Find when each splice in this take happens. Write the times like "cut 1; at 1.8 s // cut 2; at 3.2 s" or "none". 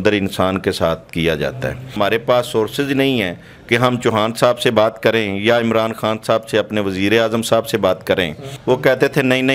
cut 1; at 1.9 s // cut 2; at 8.5 s